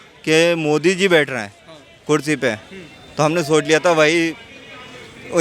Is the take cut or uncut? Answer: uncut